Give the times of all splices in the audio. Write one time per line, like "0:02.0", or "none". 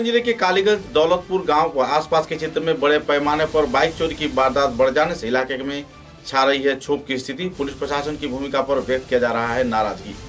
none